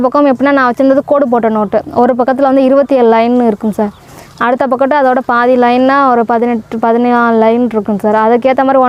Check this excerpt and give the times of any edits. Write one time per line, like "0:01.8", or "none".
none

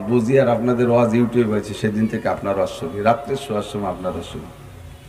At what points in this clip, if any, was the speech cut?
none

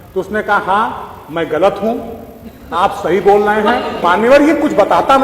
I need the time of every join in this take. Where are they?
0:04.0

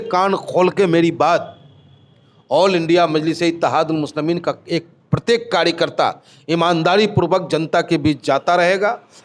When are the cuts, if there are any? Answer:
none

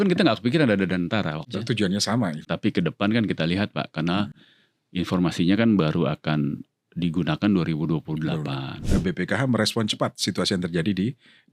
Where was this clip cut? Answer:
0:01.5
0:02.4
0:08.9

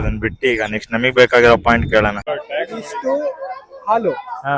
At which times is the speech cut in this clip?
0:02.3

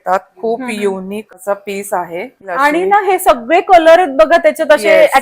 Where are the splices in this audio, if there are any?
0:01.3
0:02.5

